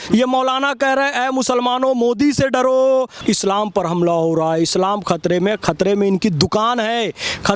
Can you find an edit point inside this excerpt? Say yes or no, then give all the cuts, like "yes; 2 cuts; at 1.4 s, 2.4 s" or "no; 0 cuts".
yes; 1 cut; at 3.1 s